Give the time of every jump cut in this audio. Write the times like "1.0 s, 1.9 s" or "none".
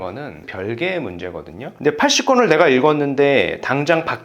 1.7 s